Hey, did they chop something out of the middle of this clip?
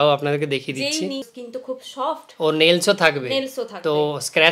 yes; 1 cut; at 1.4 s

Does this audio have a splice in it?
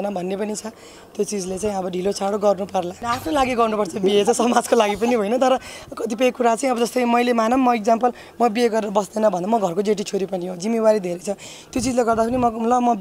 yes; 1 cut; at 3.0 s

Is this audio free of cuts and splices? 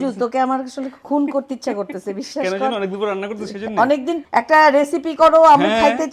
no; 2 cuts; at 1.0 s, 4.1 s

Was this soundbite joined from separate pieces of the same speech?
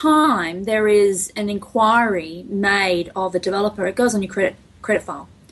no; 0 cuts

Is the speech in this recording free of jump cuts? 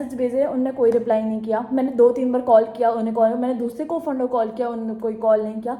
yes; 0 cuts

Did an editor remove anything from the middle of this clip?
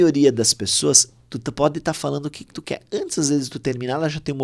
no; 0 cuts

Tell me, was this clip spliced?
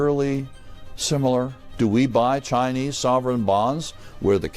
yes; 1 cut; at 1.6 s

